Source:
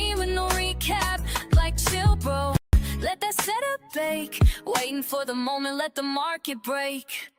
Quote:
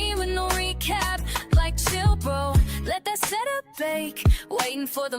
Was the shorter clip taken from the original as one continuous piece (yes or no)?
no